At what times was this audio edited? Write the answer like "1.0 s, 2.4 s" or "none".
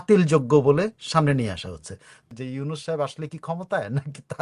2.2 s